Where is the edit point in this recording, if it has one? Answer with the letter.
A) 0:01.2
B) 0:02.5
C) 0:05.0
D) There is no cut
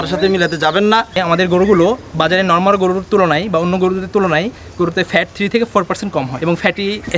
A